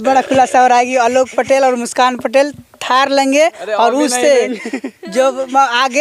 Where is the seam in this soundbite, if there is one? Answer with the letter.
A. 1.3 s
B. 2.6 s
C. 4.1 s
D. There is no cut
D